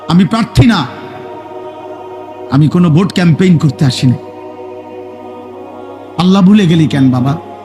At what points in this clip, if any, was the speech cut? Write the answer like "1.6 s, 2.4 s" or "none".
4.2 s, 6.2 s